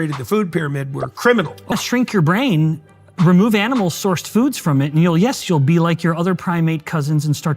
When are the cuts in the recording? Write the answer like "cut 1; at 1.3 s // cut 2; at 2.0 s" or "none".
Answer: cut 1; at 1.7 s